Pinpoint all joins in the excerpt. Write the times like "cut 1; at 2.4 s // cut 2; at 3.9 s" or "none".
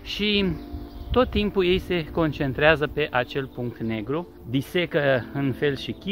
cut 1; at 4.4 s